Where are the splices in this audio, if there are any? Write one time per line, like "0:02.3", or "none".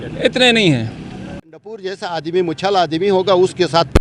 0:01.7